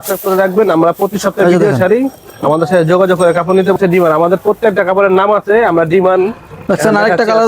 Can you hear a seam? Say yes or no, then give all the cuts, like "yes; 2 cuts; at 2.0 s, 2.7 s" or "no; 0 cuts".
yes; 1 cut; at 3.8 s